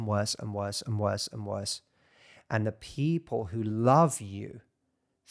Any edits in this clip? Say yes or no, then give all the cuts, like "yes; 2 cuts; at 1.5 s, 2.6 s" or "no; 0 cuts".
no; 0 cuts